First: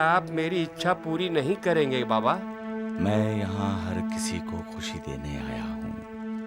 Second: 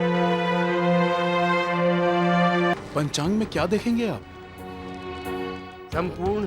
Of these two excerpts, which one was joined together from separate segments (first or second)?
second